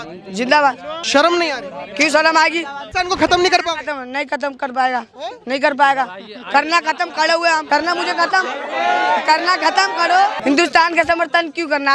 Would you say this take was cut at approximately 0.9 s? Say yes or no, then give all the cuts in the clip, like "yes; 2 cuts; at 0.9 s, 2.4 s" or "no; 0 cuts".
yes; 4 cuts; at 0.9 s, 2.8 s, 7.6 s, 10.4 s